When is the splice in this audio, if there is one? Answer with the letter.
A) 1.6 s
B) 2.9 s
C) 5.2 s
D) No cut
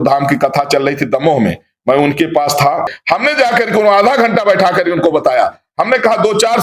B